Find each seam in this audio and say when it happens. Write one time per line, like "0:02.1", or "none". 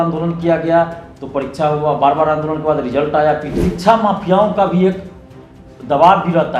0:03.6